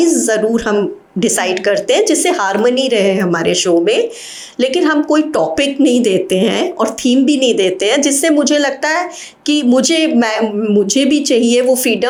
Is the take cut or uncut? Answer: uncut